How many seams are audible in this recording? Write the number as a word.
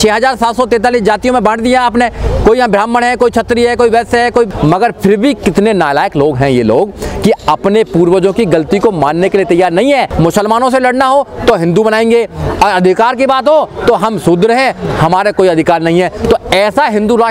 two